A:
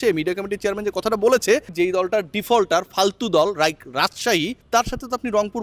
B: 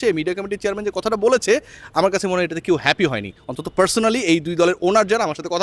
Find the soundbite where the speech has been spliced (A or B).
A